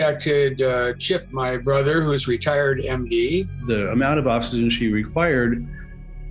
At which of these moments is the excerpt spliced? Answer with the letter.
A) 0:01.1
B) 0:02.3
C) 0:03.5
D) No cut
C